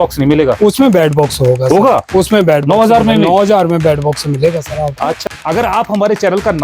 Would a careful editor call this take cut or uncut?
cut